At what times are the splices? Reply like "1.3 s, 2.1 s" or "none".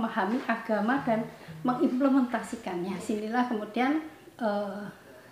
3.0 s